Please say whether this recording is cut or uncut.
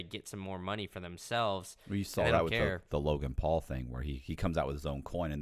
uncut